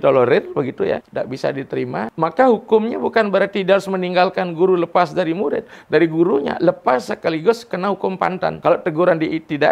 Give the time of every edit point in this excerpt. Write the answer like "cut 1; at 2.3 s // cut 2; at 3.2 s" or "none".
cut 1; at 1.1 s // cut 2; at 2.1 s // cut 3; at 8.6 s